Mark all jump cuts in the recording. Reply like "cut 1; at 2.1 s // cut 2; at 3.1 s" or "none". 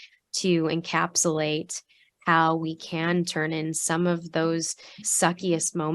cut 1; at 5.0 s